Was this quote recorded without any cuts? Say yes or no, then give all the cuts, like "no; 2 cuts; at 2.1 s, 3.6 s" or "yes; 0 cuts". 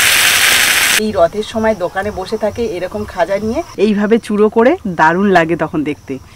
no; 1 cut; at 1.0 s